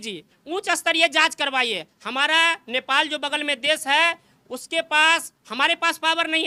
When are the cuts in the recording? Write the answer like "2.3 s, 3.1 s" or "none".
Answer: none